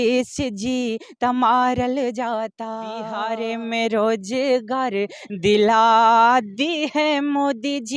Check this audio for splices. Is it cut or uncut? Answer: cut